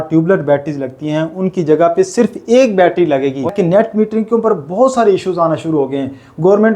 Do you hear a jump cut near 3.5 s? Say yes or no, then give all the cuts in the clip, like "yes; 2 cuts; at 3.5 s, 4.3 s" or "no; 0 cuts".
yes; 1 cut; at 3.5 s